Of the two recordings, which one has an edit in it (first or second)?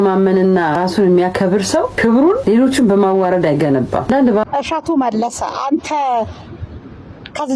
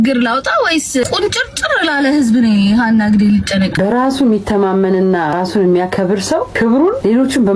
first